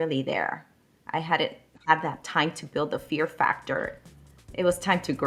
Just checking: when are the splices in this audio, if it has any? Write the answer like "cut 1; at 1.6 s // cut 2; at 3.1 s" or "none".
none